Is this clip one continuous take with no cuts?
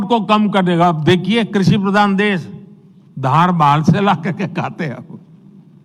yes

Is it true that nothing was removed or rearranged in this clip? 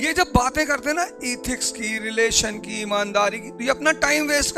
yes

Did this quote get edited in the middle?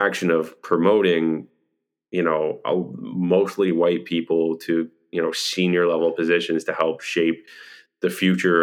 no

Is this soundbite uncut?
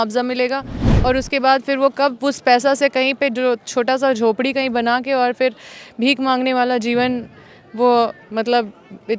yes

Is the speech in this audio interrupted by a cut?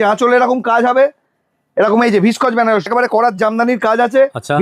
yes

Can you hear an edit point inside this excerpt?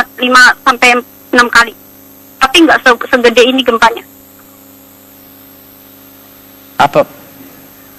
yes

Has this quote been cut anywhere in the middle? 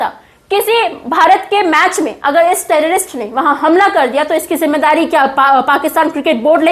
no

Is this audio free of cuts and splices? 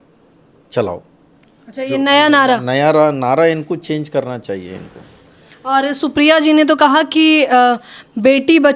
yes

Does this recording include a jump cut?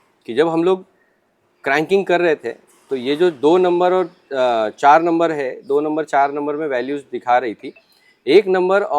no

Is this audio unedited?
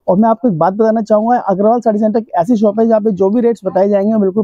yes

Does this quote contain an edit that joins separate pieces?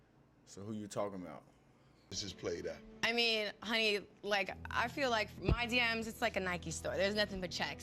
yes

